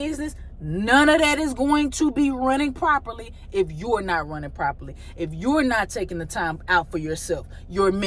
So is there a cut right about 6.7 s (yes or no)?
no